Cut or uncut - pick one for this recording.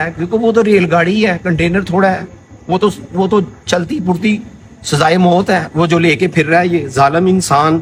uncut